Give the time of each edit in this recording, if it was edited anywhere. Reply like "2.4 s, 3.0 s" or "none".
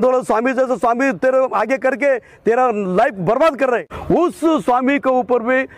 3.9 s